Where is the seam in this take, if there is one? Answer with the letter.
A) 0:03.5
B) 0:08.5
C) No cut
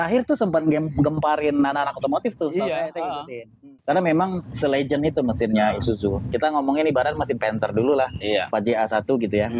A